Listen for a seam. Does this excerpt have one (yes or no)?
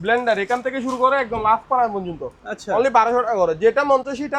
no